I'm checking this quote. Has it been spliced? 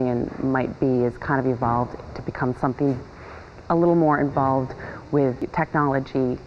yes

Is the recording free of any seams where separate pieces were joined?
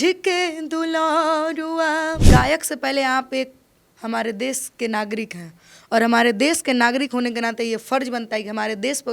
no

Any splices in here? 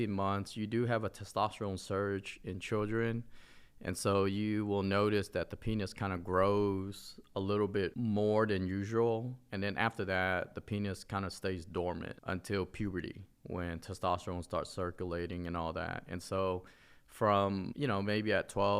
no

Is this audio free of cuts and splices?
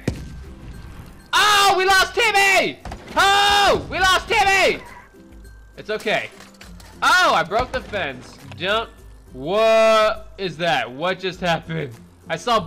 yes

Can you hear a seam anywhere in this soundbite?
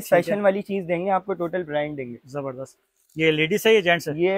no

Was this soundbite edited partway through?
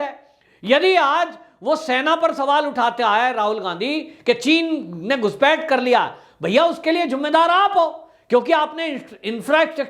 no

